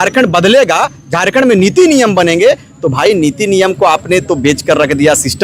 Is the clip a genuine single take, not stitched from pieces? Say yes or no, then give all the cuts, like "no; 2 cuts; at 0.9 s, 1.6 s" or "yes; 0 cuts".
yes; 0 cuts